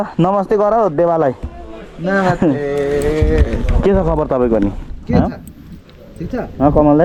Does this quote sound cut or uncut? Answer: uncut